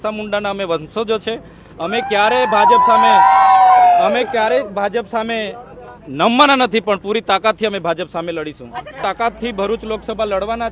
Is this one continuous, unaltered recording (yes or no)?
no